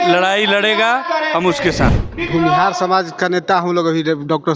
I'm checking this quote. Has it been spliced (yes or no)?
yes